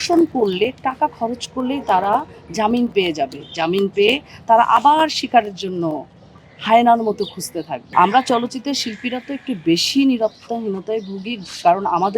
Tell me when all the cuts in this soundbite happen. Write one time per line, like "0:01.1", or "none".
0:07.8